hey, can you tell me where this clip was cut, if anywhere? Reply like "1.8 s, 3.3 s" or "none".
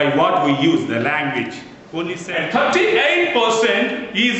2.2 s

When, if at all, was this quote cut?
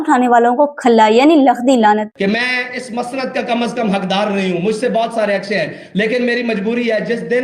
2.1 s

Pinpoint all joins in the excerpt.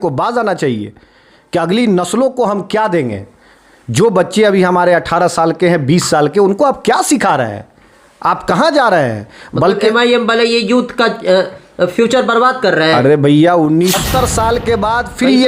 14.0 s

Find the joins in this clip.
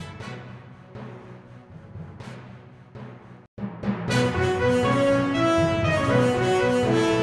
none

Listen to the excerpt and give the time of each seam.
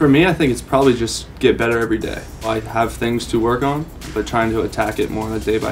2.5 s, 4.0 s

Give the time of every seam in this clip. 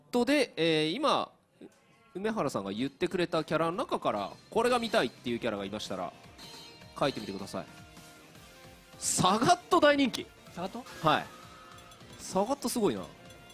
none

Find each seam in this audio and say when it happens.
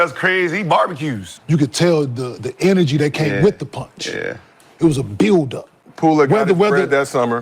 1.3 s

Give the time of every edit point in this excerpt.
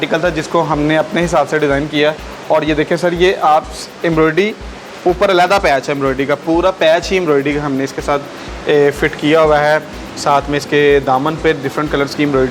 none

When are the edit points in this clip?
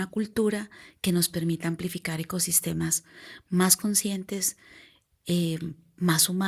none

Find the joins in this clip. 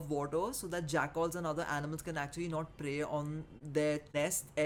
none

